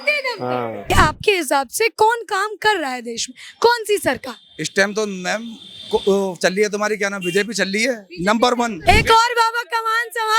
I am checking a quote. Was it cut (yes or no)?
yes